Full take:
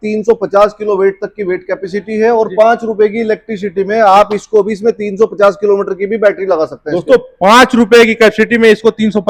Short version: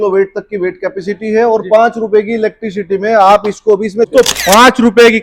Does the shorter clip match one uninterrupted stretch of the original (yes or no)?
no